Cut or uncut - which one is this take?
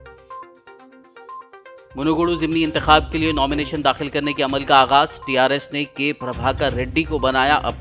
cut